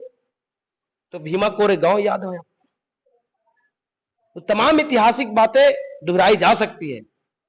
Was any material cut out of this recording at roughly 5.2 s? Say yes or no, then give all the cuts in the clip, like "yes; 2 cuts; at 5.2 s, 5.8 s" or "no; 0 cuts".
no; 0 cuts